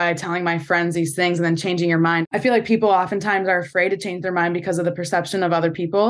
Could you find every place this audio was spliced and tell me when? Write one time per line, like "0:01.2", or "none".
0:02.2